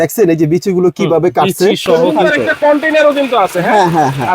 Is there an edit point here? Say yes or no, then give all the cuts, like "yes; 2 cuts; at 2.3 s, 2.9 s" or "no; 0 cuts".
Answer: yes; 1 cut; at 2.1 s